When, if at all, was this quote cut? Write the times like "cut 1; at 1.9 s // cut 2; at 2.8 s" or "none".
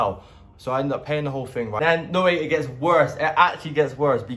cut 1; at 1.8 s